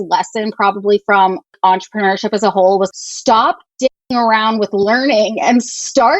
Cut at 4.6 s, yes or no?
no